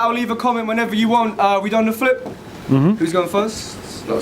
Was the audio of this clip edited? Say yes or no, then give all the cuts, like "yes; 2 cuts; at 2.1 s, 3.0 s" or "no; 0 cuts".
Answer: yes; 1 cut; at 3.2 s